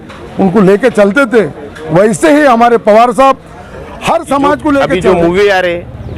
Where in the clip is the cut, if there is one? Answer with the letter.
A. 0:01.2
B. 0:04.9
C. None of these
B